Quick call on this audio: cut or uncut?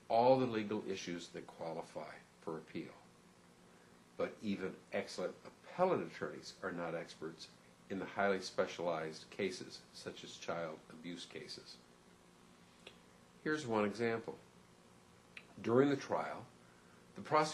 cut